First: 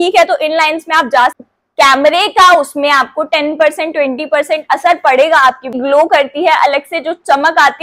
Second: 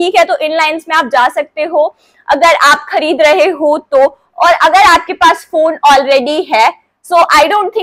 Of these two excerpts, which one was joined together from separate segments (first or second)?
first